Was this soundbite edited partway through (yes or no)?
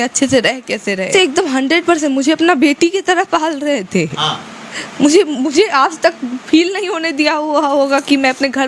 yes